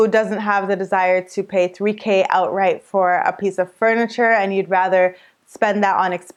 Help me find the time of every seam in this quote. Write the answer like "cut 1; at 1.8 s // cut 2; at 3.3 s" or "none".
none